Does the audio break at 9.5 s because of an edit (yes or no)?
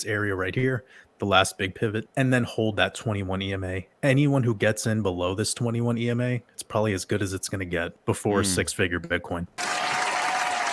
yes